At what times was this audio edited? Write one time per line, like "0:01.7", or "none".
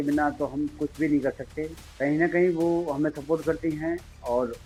none